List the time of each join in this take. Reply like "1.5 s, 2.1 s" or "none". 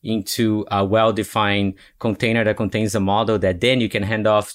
none